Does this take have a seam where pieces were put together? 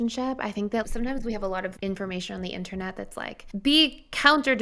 yes; 2 cuts; at 1.8 s, 3.4 s

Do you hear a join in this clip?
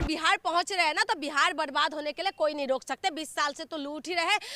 no; 0 cuts

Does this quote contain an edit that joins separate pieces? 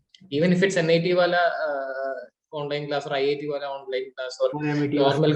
no; 0 cuts

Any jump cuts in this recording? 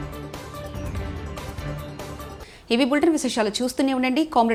no; 0 cuts

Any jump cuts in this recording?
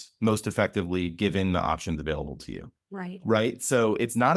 no; 0 cuts

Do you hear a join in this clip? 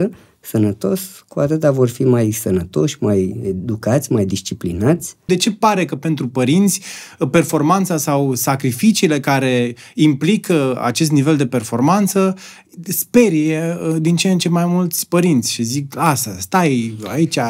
yes; 1 cut; at 5.3 s

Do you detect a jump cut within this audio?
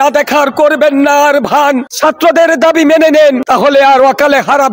yes; 2 cuts; at 1.9 s, 3.4 s

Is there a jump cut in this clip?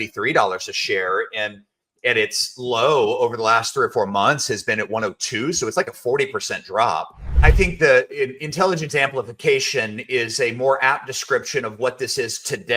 yes; 1 cut; at 7.4 s

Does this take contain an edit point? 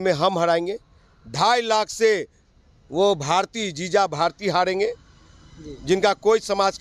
no; 0 cuts

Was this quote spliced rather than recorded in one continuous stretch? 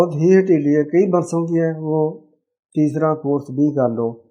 no; 0 cuts

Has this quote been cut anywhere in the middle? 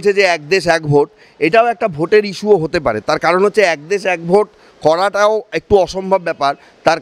no; 0 cuts

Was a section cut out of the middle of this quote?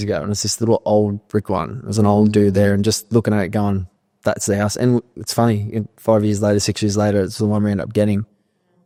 no; 0 cuts

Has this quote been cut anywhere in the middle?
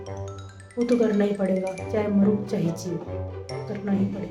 no; 0 cuts

